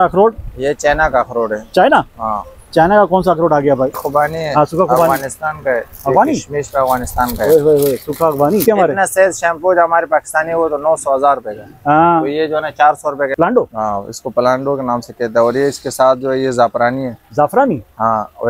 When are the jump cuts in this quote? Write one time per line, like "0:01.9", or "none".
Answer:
0:04.0
0:08.6
0:13.3